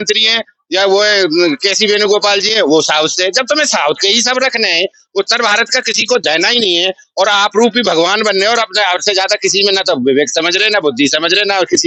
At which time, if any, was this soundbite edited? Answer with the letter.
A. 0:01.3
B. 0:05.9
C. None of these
C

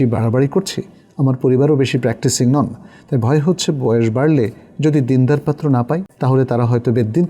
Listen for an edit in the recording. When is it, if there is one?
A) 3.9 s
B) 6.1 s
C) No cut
B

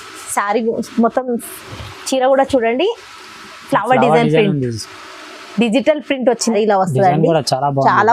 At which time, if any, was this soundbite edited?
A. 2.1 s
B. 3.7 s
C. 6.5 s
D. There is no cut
C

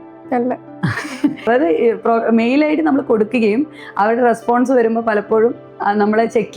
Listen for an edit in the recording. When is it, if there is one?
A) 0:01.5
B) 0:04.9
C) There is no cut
A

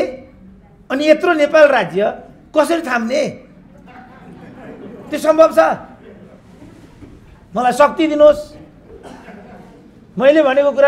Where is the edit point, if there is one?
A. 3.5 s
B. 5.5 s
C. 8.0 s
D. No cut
D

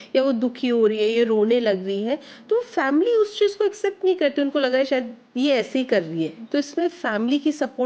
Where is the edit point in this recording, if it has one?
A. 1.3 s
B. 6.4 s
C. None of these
B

